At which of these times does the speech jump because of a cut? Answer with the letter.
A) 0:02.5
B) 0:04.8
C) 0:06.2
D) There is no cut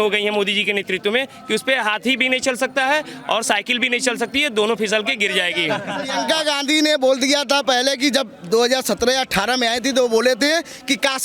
C